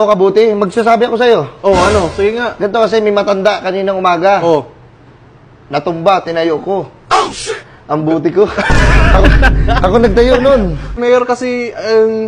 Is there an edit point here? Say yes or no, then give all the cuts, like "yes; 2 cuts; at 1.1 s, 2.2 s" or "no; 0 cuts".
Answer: yes; 1 cut; at 11.0 s